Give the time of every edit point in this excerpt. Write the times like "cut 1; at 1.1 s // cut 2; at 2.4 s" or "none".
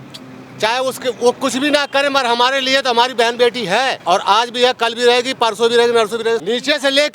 cut 1; at 4.0 s // cut 2; at 6.4 s

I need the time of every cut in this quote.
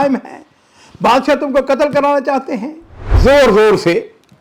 cut 1; at 3.1 s

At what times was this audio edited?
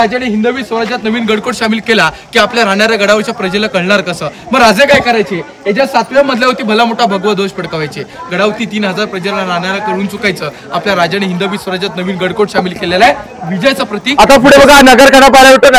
cut 1; at 14.0 s

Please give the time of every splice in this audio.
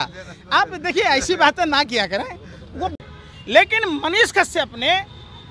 cut 1; at 2.9 s

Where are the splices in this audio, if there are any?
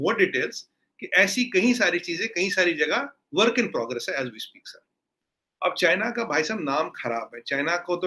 cut 1; at 5.1 s

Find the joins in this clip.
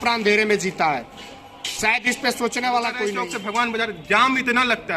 cut 1; at 3.2 s

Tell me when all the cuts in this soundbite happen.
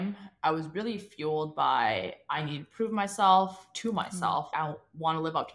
cut 1; at 4.5 s

